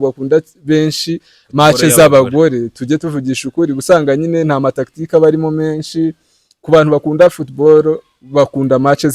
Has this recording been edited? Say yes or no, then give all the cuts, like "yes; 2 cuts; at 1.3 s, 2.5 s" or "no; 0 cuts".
no; 0 cuts